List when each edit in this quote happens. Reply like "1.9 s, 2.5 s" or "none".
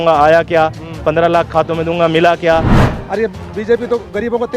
2.8 s